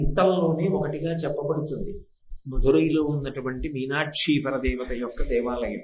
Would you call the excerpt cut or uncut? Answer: uncut